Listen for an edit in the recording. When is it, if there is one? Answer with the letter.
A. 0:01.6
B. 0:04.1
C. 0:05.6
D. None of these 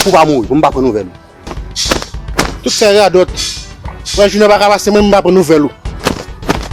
A